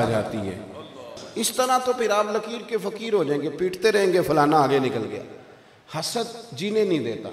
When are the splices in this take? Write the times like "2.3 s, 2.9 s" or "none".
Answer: 1.2 s